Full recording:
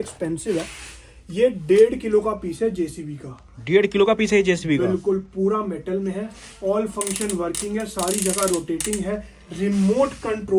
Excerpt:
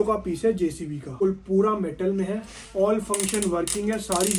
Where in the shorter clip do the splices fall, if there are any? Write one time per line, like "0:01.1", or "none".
0:01.2